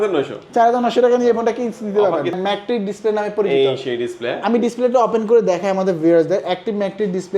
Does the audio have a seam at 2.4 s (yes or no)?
yes